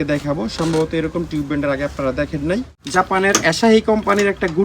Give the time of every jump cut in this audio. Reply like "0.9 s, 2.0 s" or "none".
2.8 s